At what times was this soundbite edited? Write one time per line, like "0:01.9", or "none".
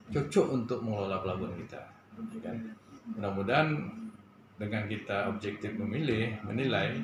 none